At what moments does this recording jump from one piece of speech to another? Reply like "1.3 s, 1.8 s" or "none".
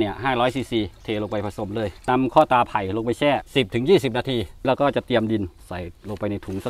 2.1 s, 3.5 s, 4.6 s